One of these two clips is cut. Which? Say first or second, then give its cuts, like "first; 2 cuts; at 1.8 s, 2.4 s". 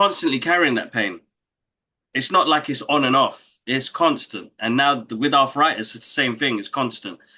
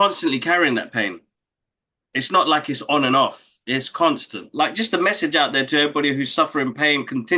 second; 1 cut; at 4.5 s